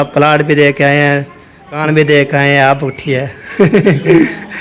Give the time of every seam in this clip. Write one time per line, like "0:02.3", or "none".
0:01.8